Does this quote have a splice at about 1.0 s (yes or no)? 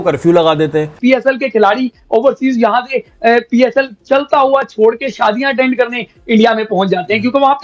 yes